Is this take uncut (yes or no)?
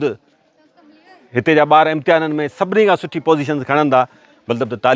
yes